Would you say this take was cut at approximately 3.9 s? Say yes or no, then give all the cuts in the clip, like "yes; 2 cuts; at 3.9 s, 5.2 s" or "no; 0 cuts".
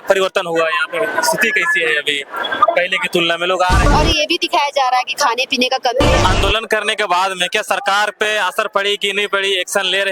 yes; 2 cuts; at 3.9 s, 6.2 s